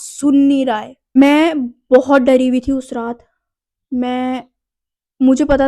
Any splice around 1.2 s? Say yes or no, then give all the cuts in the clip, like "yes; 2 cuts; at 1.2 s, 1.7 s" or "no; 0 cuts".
yes; 1 cut; at 1.2 s